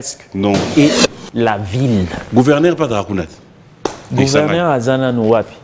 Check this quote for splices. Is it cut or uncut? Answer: cut